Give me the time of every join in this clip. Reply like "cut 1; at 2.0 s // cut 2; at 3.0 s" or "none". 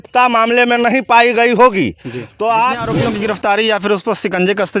cut 1; at 2.8 s